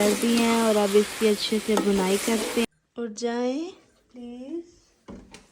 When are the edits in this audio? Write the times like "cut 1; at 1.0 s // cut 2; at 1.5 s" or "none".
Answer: cut 1; at 2.6 s